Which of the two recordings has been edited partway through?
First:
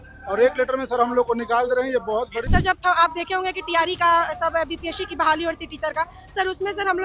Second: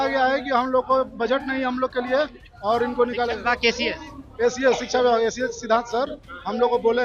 first; 1 cut; at 2.5 s

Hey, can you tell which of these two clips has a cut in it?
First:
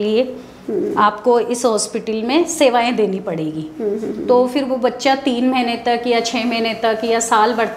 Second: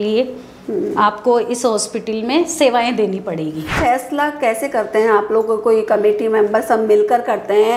second; 1 cut; at 3.7 s

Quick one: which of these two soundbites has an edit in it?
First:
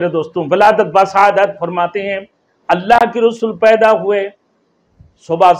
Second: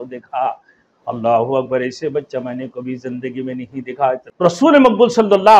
second; 1 cut; at 4.3 s

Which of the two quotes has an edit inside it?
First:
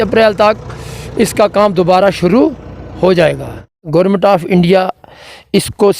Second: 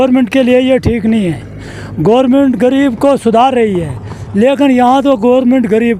first; 1 cut; at 3.7 s

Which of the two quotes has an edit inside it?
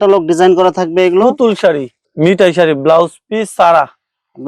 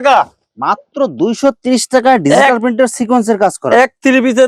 first; 1 cut; at 2.0 s

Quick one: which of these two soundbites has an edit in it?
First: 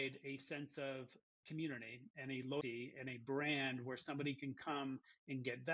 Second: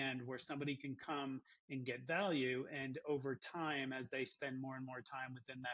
first; 2 cuts; at 1.3 s, 2.6 s

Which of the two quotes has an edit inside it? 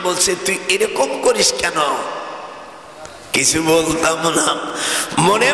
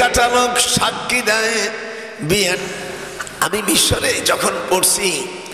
second; 1 cut; at 2.6 s

